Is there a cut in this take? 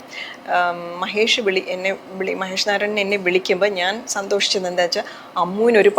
no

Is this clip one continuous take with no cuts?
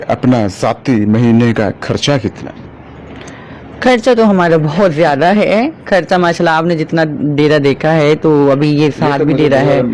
yes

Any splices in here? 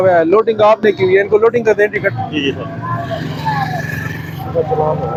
no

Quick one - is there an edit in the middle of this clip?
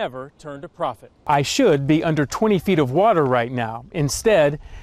yes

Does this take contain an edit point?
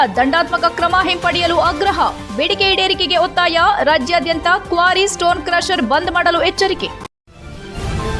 yes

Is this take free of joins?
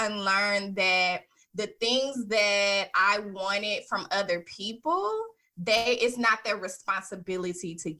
yes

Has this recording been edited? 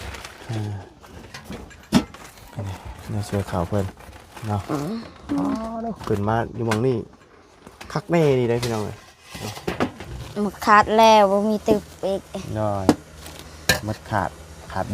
yes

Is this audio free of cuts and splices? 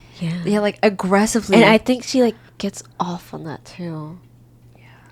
yes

